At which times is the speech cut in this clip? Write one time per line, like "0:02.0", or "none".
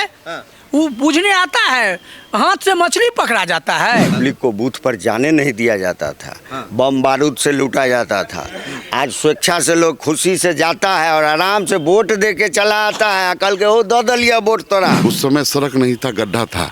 0:04.2
0:15.0

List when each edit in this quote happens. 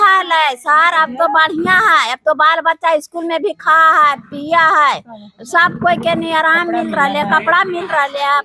none

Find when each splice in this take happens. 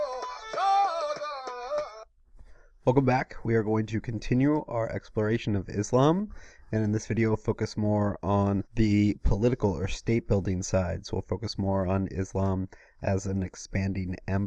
0:08.3

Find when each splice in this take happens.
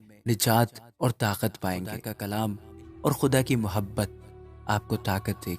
0:02.2

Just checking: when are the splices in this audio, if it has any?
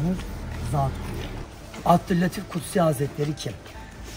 0:01.4

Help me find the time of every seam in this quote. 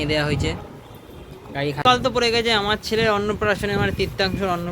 0:01.8

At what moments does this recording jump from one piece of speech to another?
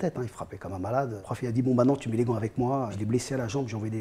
0:01.2
0:03.0

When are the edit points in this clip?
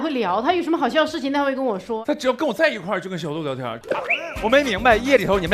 0:02.0
0:03.7

